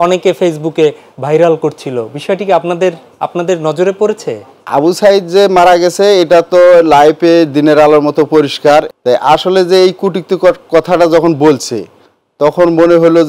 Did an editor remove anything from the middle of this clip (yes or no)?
yes